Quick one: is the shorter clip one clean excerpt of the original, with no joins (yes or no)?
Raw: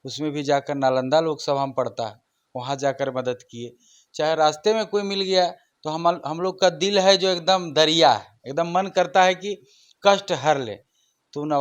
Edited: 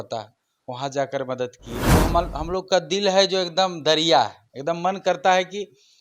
no